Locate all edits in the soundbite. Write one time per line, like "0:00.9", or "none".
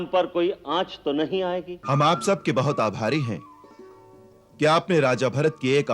0:01.7